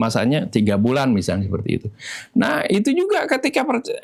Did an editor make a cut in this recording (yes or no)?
no